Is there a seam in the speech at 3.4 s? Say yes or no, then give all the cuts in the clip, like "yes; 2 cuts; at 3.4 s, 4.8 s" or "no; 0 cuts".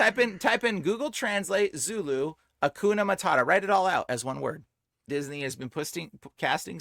no; 1 cut; at 5.1 s